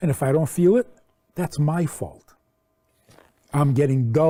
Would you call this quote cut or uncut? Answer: uncut